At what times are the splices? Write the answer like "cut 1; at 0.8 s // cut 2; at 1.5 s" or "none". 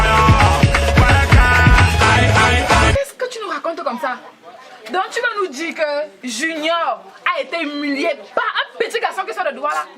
cut 1; at 2.9 s